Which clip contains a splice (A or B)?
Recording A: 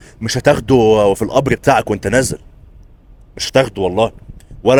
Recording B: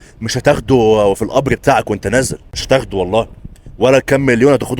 B